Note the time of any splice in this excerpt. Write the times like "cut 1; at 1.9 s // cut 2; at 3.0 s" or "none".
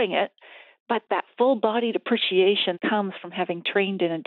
cut 1; at 1.0 s // cut 2; at 2.8 s